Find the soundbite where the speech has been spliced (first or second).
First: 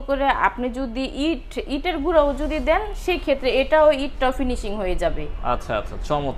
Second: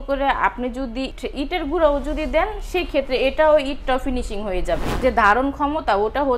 second